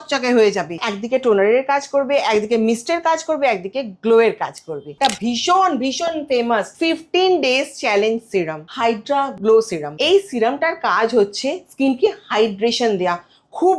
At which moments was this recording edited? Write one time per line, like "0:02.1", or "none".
0:00.9
0:04.9
0:06.7
0:09.1
0:09.8